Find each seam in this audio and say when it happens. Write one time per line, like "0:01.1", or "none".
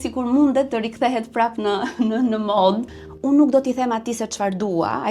0:02.9